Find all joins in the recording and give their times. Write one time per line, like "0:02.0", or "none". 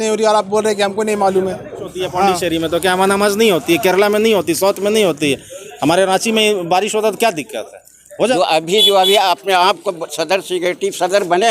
0:01.9
0:08.3